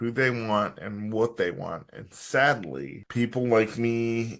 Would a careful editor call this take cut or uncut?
cut